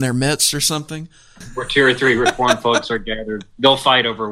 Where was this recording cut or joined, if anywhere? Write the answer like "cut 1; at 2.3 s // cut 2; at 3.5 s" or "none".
cut 1; at 1.5 s